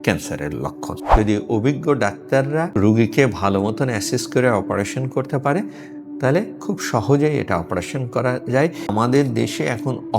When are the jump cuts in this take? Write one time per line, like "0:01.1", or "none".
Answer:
0:00.9
0:02.7
0:08.9